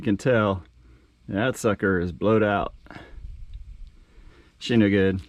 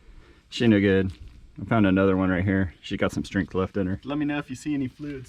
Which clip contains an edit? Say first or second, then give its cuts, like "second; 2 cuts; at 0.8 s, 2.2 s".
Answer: second; 1 cut; at 4.0 s